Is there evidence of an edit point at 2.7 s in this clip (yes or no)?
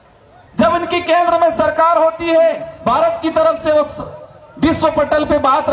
yes